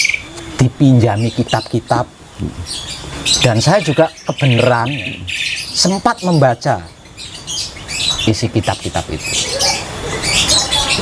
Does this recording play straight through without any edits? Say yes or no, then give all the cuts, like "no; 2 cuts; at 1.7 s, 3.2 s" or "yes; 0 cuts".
yes; 0 cuts